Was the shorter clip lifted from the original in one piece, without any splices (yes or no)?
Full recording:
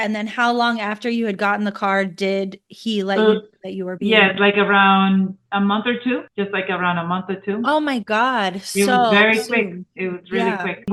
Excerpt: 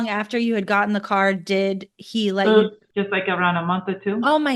no